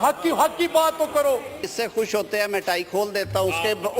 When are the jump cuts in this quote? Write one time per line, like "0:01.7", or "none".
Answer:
0:01.7